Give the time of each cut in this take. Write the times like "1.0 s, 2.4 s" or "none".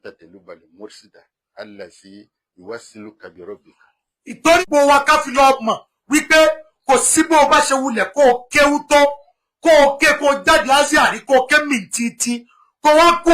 4.6 s